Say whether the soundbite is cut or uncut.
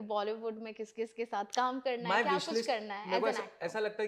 uncut